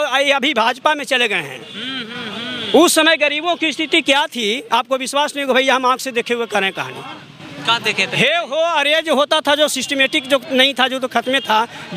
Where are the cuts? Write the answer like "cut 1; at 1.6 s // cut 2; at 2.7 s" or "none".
none